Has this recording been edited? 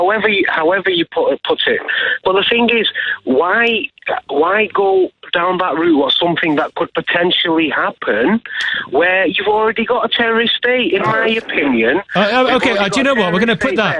yes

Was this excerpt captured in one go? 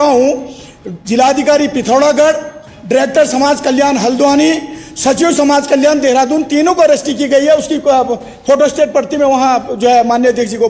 yes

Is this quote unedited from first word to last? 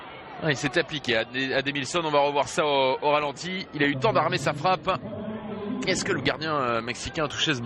yes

